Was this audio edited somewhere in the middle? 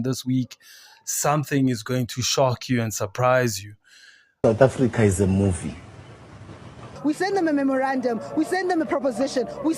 yes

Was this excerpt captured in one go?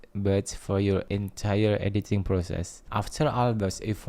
no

